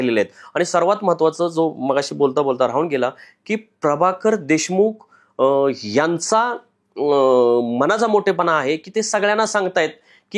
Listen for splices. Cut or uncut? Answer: uncut